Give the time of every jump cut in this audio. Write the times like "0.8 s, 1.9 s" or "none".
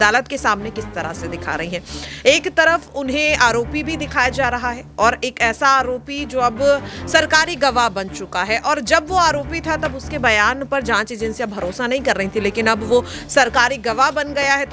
none